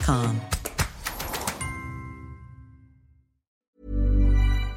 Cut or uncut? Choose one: cut